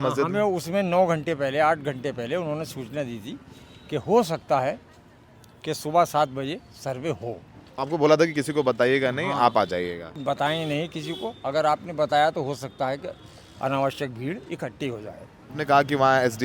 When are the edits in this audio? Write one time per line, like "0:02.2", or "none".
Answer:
0:07.6
0:10.2
0:15.5